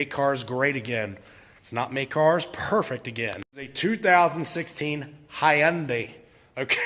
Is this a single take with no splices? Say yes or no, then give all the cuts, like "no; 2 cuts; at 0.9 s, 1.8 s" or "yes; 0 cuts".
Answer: yes; 0 cuts